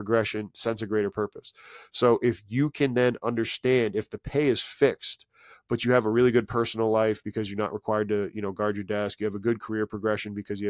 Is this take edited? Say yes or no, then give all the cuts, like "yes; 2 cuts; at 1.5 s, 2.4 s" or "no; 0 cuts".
no; 0 cuts